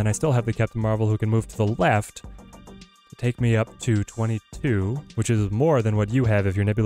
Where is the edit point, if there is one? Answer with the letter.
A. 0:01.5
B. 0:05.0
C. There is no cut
C